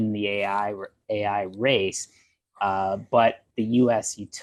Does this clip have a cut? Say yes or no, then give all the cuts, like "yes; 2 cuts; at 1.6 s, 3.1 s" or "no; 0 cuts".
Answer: no; 0 cuts